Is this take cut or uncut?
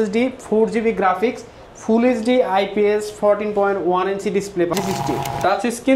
cut